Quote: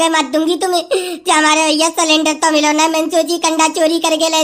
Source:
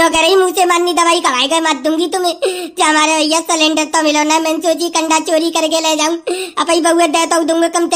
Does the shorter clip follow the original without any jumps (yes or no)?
yes